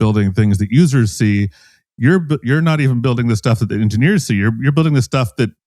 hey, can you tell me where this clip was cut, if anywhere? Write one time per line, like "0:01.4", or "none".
none